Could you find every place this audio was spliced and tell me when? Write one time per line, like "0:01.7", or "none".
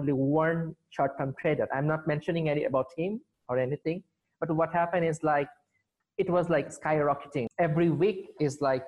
0:07.5